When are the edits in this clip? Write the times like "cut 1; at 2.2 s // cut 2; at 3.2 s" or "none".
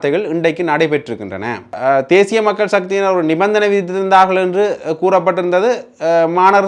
cut 1; at 1.8 s

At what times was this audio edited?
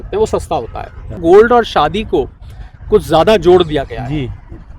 cut 1; at 1.2 s

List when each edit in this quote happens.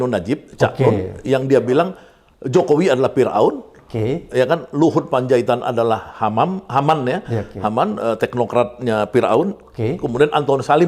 none

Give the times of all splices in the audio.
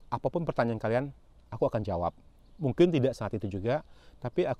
none

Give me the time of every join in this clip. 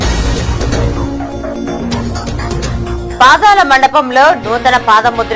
cut 1; at 0.9 s

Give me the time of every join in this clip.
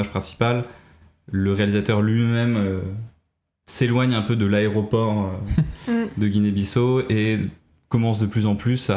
none

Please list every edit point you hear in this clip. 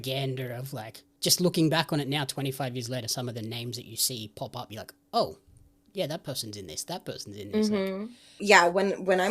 cut 1; at 1.1 s // cut 2; at 8.4 s

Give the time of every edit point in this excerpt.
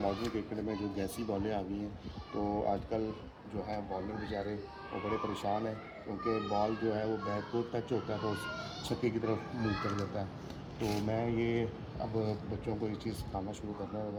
none

